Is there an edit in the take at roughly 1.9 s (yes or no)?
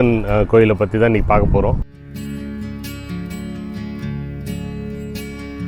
yes